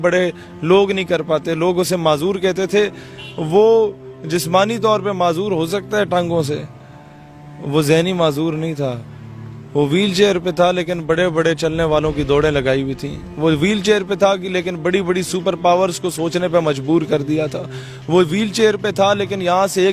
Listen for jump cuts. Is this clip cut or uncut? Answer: uncut